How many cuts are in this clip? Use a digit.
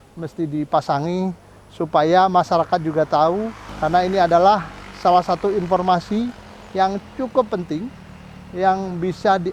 1